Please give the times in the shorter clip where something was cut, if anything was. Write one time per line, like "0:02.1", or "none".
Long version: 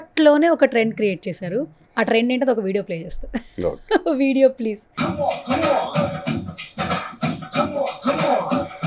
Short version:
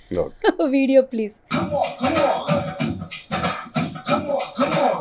none